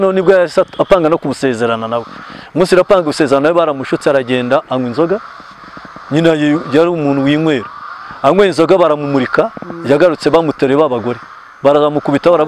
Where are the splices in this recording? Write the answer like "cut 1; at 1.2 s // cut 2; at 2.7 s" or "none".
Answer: none